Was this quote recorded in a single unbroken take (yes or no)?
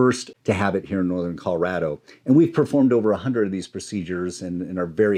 yes